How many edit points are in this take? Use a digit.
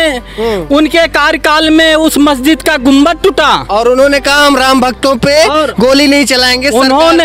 0